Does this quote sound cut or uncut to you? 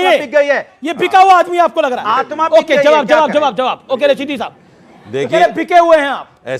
uncut